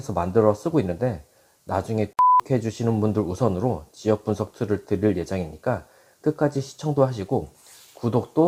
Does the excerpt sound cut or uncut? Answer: uncut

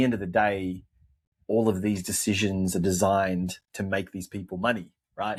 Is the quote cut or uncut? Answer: uncut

